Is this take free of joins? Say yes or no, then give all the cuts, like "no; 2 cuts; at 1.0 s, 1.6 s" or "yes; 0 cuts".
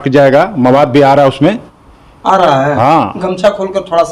yes; 0 cuts